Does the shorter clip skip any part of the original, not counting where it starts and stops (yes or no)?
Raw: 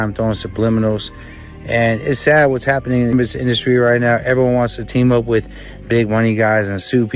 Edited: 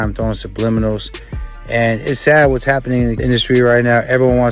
yes